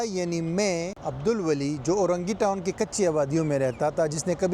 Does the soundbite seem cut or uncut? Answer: cut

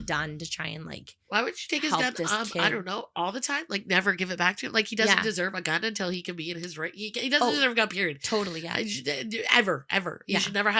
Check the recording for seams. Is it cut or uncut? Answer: uncut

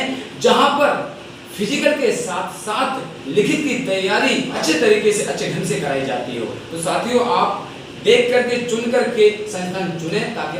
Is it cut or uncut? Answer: cut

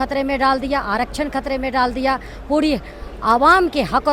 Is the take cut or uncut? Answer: uncut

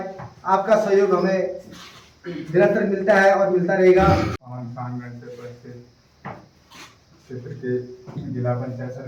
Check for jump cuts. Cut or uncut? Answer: uncut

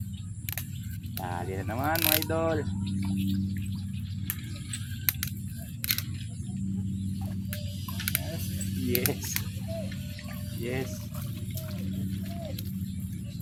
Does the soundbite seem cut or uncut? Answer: uncut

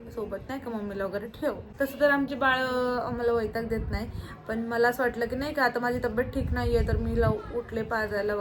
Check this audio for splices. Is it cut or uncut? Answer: uncut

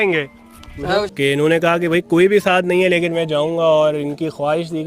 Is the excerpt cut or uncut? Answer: cut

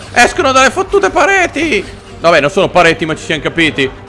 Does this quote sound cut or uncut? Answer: uncut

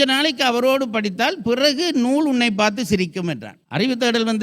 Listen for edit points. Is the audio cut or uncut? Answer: cut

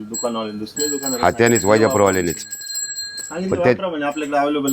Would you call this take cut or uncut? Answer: cut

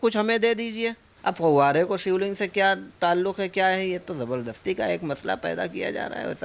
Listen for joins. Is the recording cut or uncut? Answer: cut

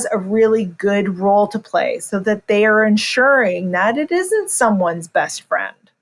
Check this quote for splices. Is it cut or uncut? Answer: uncut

